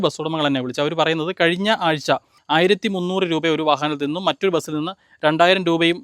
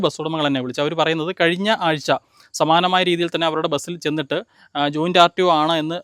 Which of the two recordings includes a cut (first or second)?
first